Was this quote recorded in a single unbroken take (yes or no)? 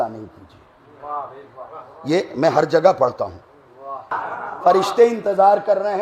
no